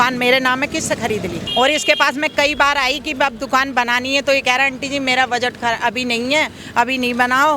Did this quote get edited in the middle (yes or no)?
yes